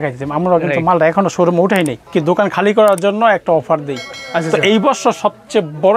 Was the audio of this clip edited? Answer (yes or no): yes